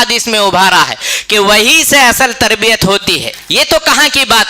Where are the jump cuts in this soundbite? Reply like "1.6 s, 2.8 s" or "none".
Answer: 3.3 s